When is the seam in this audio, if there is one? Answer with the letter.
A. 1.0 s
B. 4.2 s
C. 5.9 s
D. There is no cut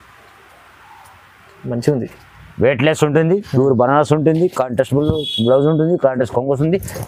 D